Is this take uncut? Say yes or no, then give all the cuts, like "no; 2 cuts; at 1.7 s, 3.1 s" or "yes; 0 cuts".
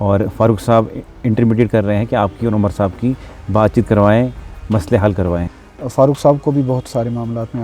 no; 1 cut; at 5.4 s